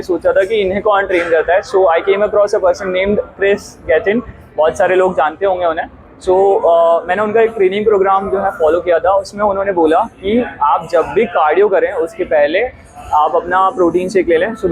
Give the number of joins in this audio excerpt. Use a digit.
0